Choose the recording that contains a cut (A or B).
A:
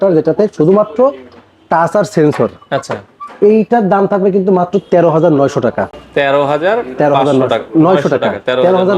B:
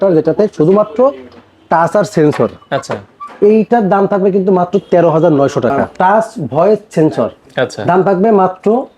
B